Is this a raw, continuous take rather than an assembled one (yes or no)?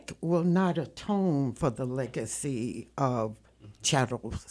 yes